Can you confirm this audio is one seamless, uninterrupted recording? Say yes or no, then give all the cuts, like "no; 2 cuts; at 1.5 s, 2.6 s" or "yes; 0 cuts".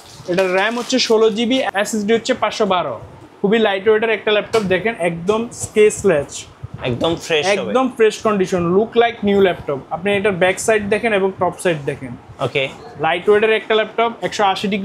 yes; 0 cuts